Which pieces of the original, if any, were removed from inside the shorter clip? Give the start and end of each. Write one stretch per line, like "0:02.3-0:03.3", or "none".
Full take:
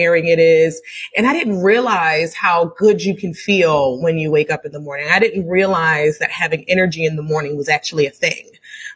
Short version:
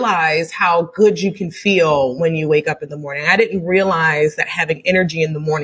none

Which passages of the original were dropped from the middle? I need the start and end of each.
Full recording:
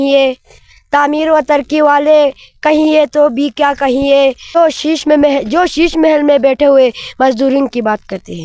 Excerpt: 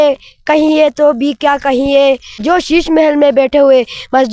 0:04.5-0:05.4

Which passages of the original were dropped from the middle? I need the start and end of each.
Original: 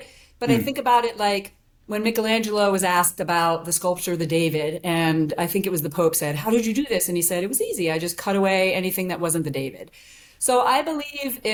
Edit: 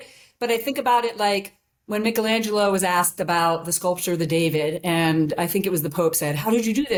none

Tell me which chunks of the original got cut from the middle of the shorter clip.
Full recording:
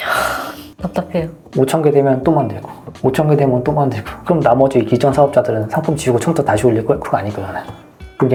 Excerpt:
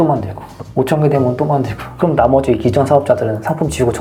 none

